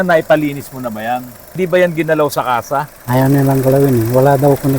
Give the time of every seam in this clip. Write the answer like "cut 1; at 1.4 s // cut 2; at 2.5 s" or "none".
cut 1; at 1.4 s